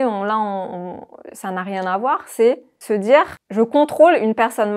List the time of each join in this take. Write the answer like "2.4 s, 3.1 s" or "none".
2.7 s, 3.4 s